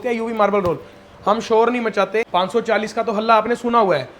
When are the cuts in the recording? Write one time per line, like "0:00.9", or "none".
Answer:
0:02.3